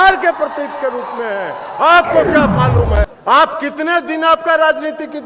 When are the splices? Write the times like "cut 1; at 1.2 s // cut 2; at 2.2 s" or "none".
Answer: cut 1; at 3.1 s